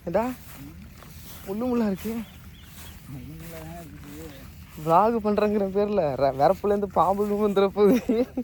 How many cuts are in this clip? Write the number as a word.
zero